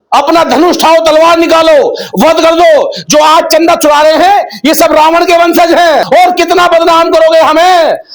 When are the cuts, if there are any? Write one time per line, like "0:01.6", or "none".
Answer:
0:06.1